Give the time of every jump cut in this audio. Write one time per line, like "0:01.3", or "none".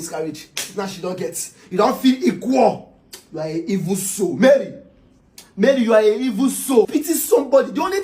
0:06.9